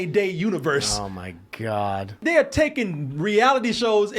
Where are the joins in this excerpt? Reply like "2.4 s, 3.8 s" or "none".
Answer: 2.2 s